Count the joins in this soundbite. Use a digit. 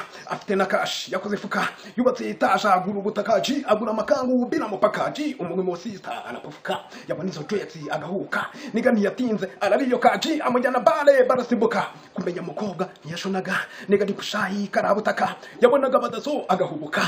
0